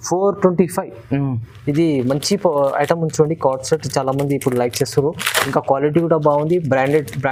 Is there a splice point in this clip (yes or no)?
no